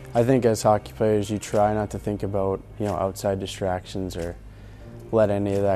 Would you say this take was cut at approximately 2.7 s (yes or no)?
no